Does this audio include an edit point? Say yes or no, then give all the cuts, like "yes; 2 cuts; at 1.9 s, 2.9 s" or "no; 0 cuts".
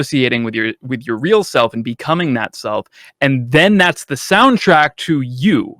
no; 0 cuts